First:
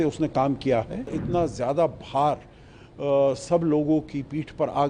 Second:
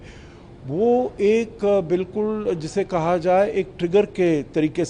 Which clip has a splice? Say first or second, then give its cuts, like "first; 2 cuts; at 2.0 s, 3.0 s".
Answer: first; 1 cut; at 1.2 s